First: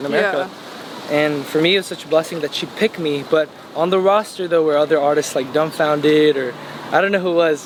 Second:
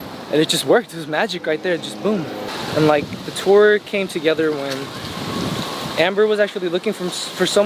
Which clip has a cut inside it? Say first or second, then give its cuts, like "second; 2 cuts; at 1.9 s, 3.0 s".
second; 1 cut; at 2.4 s